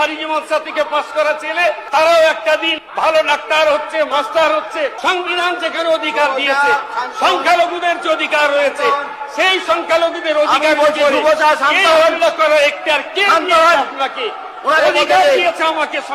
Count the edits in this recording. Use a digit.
4